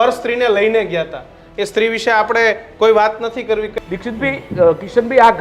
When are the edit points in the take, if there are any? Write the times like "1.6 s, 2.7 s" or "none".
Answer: 3.7 s